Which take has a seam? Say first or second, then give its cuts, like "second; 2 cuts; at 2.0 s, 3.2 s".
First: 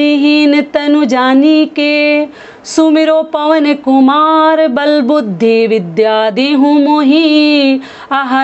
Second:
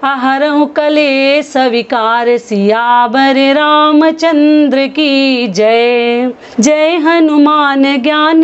second; 1 cut; at 6.4 s